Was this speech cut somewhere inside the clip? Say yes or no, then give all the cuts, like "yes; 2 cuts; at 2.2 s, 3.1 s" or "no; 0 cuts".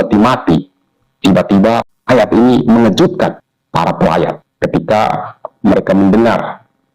yes; 3 cuts; at 1.9 s, 3.5 s, 4.5 s